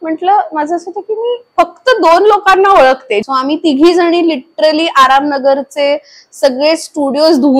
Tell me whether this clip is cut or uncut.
cut